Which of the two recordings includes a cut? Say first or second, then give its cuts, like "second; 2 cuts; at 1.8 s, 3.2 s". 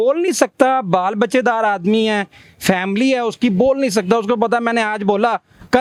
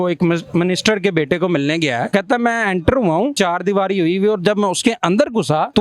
second; 2 cuts; at 2.0 s, 3.3 s